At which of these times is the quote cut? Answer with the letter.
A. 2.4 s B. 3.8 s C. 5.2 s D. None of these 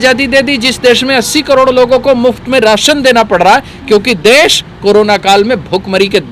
D